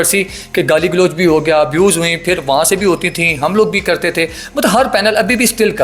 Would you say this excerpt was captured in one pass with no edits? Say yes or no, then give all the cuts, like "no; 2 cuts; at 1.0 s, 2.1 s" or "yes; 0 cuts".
yes; 0 cuts